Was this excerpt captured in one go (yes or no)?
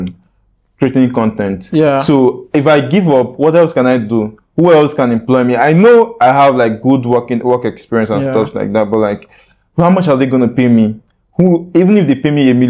yes